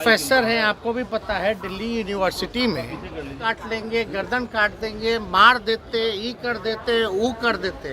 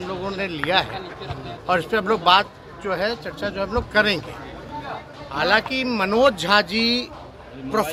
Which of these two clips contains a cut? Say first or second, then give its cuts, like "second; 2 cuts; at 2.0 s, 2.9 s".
first; 1 cut; at 3.4 s